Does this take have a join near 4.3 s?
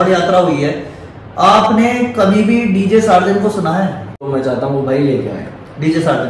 yes; 1 cut; at 4.3 s

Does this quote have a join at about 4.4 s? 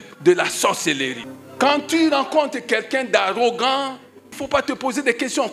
yes; 2 cuts; at 1.2 s, 4.4 s

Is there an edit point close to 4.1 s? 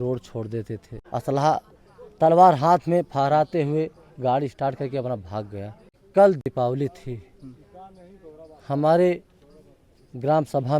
no; 2 cuts; at 0.9 s, 6.0 s

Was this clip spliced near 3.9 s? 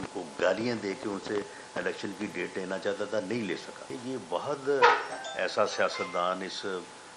yes; 1 cut; at 3.9 s

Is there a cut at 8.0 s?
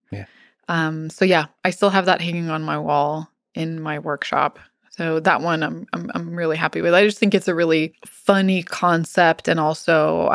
yes; 1 cut; at 8.0 s

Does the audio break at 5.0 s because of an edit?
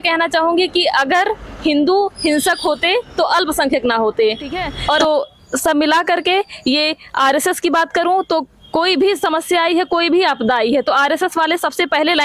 yes; 1 cut; at 5.0 s

